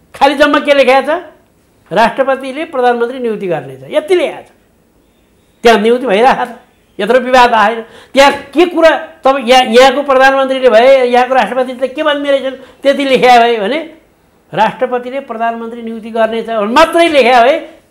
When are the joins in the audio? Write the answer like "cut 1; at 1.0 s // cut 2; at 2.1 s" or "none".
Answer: none